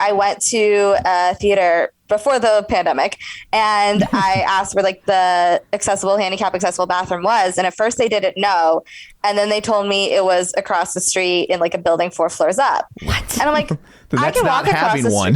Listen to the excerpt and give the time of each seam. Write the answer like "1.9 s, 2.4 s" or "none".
2.0 s